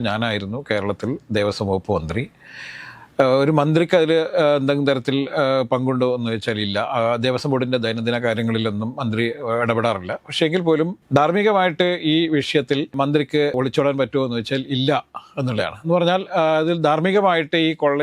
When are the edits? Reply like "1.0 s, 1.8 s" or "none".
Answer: none